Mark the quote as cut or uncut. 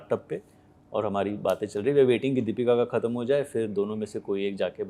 uncut